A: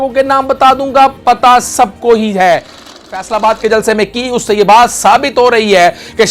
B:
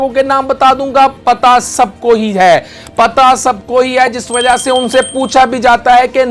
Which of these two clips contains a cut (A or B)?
A